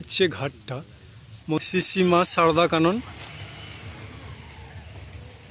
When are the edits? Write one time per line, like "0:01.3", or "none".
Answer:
0:01.6